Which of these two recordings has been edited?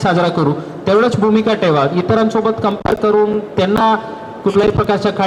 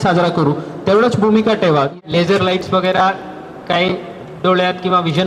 second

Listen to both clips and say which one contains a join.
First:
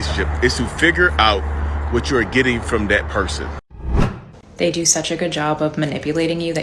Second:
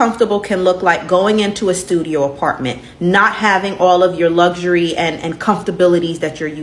first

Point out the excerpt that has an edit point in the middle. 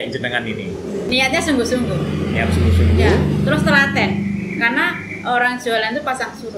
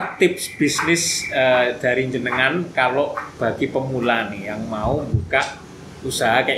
first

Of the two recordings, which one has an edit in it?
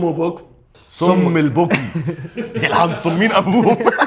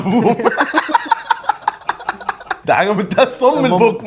second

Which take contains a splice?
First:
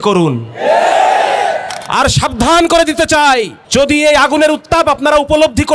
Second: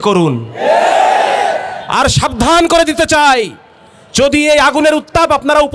first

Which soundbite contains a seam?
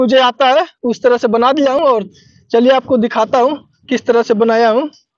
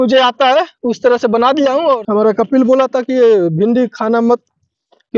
second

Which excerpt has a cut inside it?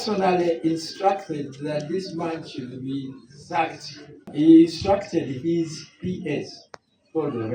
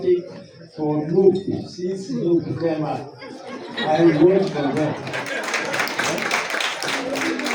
first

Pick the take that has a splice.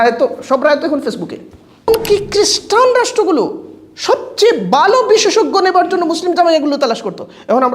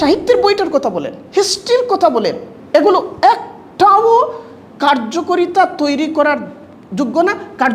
first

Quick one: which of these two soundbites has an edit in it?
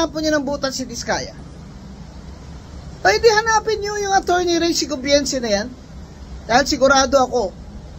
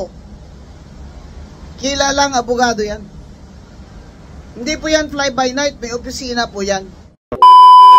second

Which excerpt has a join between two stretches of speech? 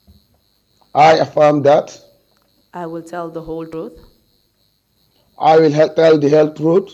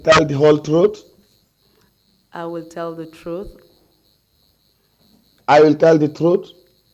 first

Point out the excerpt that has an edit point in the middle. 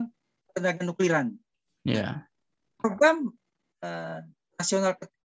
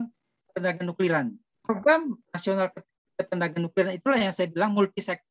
second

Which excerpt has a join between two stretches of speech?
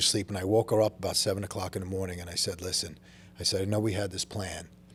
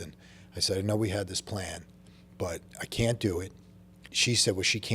second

